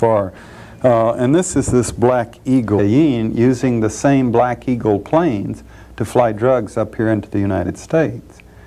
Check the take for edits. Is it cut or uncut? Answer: uncut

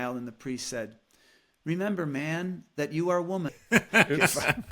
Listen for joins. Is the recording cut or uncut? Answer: cut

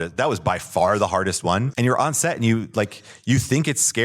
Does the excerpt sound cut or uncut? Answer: cut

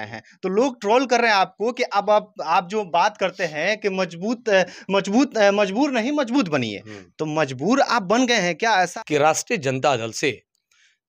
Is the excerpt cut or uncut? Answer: cut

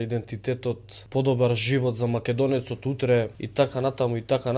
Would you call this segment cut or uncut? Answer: cut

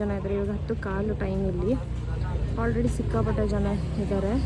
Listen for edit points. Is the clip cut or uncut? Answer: uncut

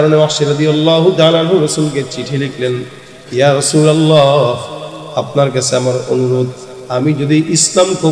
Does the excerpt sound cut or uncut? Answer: uncut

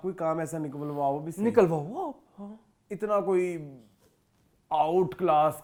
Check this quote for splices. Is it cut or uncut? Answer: uncut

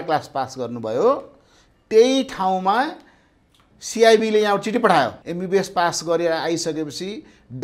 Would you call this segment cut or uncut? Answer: cut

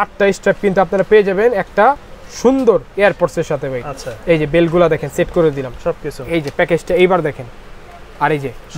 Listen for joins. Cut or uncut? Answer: uncut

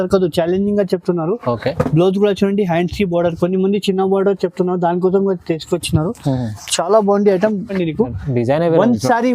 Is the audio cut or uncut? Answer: cut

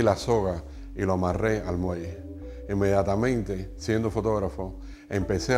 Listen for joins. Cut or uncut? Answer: uncut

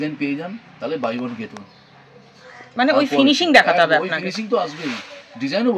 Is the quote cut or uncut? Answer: uncut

